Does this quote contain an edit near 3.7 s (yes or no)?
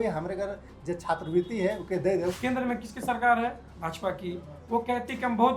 no